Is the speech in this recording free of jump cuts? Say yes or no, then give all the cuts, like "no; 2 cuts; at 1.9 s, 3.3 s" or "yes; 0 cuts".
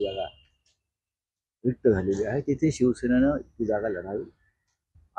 yes; 0 cuts